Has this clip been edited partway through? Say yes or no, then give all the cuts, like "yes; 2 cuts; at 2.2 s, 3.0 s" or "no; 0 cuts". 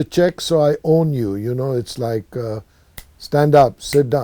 no; 0 cuts